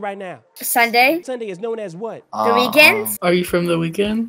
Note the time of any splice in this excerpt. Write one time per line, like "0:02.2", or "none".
0:01.3
0:03.1